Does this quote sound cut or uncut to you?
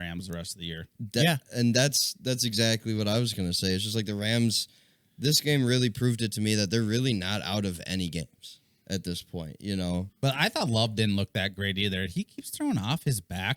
cut